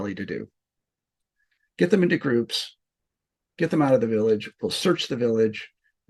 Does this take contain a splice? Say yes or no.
no